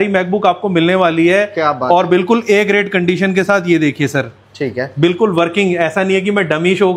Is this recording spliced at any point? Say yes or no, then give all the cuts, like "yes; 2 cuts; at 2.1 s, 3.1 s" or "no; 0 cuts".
no; 0 cuts